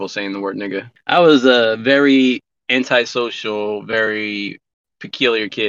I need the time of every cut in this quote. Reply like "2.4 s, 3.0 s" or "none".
0.9 s